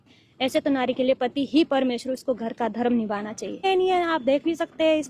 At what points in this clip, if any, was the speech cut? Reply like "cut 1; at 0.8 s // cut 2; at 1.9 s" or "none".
cut 1; at 3.6 s